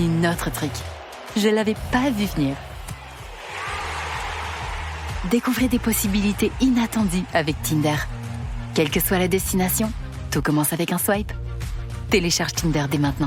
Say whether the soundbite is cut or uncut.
uncut